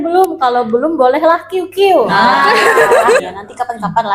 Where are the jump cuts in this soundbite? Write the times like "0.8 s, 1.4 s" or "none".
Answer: 3.2 s